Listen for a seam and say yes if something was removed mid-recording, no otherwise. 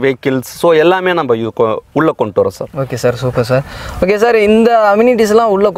no